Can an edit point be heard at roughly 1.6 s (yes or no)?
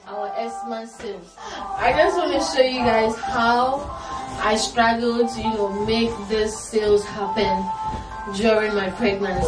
yes